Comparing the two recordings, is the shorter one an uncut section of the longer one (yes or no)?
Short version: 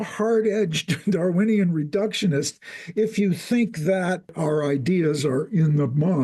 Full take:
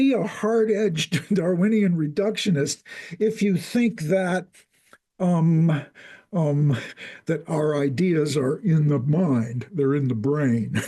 no